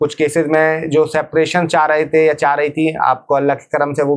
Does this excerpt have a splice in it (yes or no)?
no